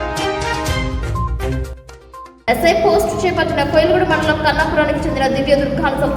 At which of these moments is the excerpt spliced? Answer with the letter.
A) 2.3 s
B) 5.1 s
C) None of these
A